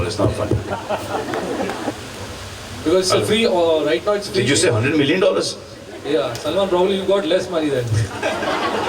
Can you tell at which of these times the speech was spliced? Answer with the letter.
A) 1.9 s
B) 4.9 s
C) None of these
A